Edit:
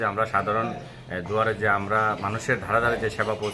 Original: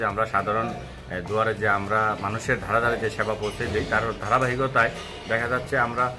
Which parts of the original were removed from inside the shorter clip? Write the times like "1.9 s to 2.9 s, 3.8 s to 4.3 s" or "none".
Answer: none